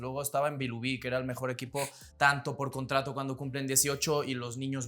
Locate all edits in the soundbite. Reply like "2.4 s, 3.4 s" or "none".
2.0 s